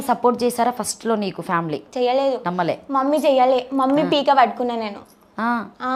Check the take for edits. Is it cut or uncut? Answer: cut